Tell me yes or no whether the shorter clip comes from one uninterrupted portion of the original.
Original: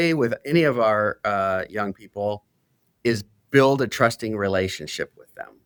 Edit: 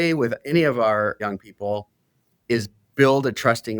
no